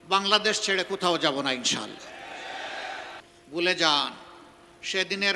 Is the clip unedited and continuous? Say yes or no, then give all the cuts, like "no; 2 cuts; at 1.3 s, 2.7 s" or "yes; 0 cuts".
no; 1 cut; at 3.3 s